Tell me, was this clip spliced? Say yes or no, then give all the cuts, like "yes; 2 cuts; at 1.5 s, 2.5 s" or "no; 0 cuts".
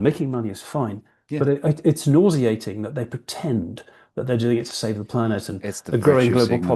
no; 0 cuts